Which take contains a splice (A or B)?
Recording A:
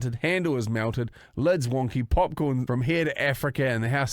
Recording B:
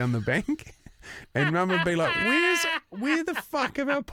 A